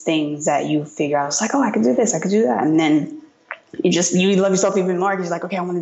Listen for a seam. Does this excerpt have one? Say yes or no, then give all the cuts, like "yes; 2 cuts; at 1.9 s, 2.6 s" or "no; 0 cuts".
no; 0 cuts